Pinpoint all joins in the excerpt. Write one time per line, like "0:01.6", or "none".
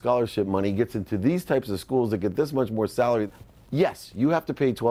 0:03.3

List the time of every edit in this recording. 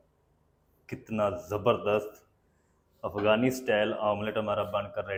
none

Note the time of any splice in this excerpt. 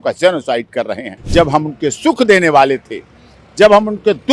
0:01.2

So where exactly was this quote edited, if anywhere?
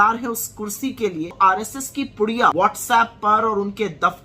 0:01.3
0:02.5

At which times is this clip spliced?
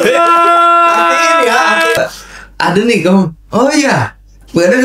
0:02.0

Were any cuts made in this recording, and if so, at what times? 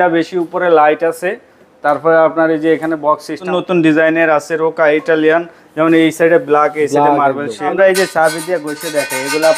0:03.4
0:07.7

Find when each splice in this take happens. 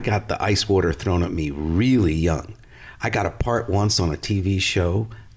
none

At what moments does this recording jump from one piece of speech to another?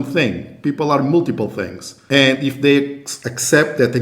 0:02.4

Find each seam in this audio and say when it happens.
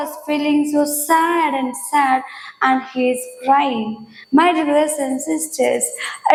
none

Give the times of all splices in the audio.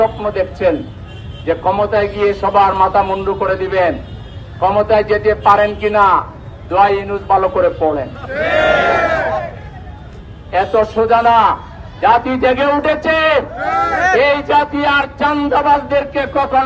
none

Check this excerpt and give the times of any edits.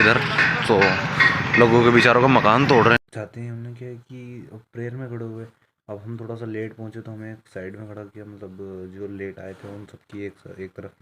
0:03.0

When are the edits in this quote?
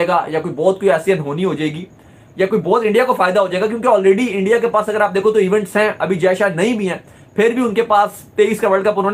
none

